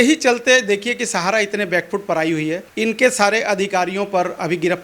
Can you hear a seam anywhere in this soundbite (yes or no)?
no